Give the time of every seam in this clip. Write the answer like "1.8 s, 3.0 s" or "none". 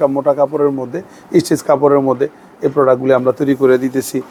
none